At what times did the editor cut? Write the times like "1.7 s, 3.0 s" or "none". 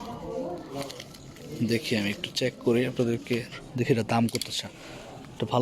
3.6 s